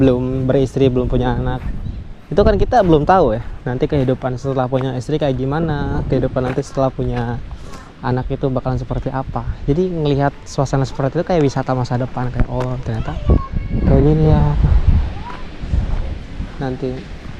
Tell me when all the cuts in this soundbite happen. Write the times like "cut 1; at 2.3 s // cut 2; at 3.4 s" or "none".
none